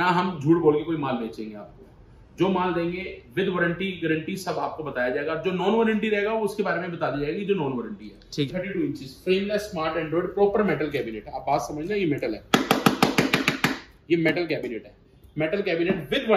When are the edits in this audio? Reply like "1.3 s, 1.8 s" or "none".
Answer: 8.5 s